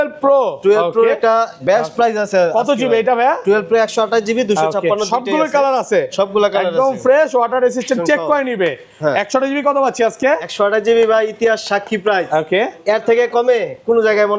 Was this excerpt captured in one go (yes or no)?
yes